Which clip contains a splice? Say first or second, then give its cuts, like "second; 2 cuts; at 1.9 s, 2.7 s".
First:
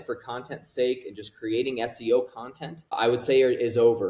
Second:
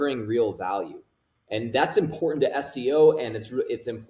first; 1 cut; at 3.0 s